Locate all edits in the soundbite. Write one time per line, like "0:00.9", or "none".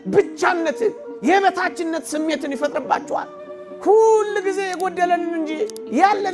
0:03.5